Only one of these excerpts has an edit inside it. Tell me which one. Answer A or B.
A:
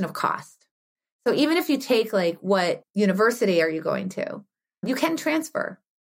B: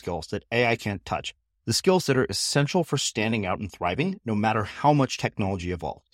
A